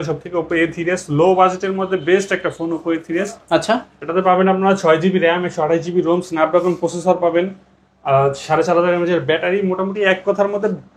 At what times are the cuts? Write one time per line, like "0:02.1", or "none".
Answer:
none